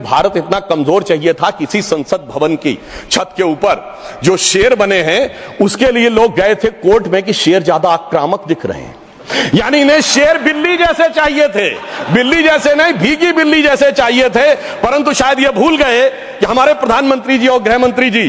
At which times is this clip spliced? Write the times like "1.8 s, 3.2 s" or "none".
none